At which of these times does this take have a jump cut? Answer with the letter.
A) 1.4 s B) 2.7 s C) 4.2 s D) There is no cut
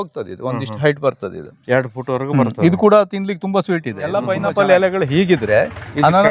C